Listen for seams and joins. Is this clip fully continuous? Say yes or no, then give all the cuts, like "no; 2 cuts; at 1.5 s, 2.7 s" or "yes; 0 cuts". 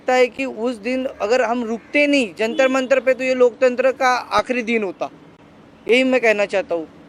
yes; 0 cuts